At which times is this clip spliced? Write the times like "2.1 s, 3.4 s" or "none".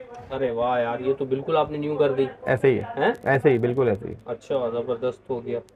none